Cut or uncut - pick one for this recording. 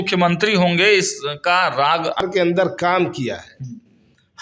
cut